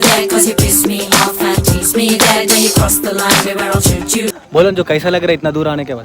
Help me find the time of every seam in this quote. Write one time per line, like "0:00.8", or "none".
0:04.4